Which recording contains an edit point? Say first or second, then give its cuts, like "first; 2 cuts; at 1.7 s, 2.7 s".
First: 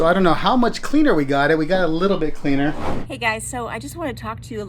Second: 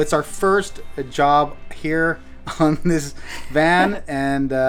first; 1 cut; at 3.1 s